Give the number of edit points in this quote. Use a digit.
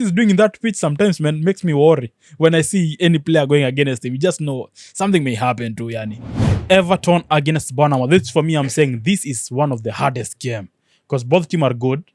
1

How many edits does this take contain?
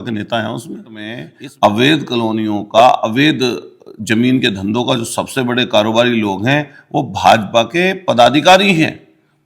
1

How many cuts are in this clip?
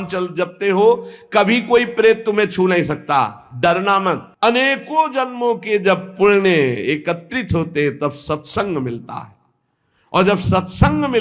1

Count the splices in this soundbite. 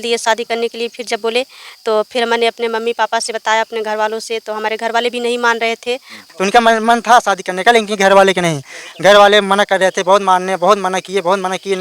1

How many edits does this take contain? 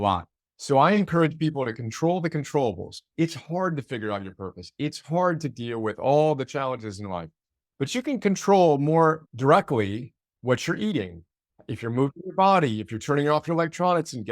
1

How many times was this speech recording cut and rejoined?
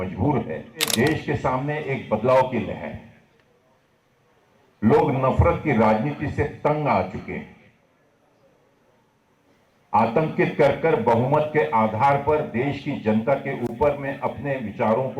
1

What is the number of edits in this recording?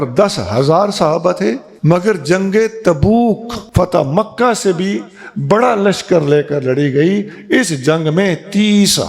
2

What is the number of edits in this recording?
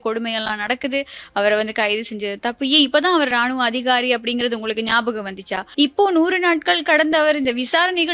1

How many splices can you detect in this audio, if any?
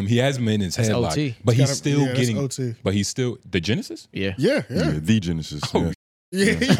0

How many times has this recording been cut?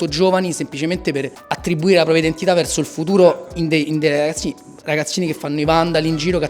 1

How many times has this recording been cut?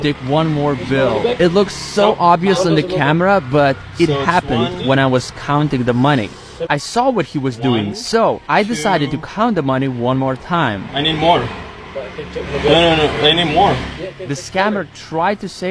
0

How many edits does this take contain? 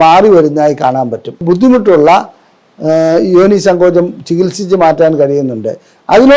1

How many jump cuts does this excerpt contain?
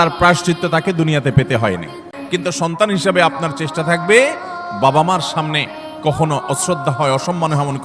1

